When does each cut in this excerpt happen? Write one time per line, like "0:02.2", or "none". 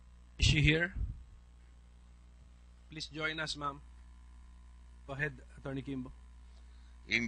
0:05.0